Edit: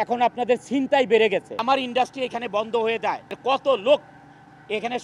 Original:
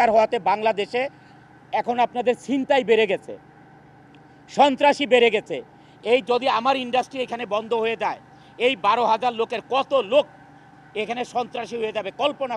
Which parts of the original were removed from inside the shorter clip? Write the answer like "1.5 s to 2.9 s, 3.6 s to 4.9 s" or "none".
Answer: 3.4 s to 6.6 s, 8.3 s to 9.6 s